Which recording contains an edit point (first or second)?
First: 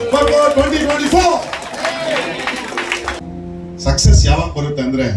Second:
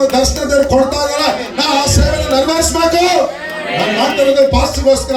first